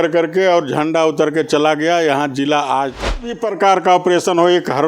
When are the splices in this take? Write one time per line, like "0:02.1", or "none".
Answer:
0:03.3